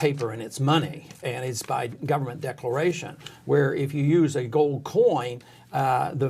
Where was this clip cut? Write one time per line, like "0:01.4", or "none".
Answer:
none